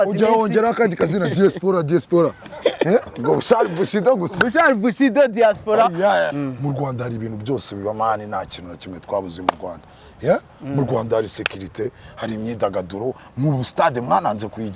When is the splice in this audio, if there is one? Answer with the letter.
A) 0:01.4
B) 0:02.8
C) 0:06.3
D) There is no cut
C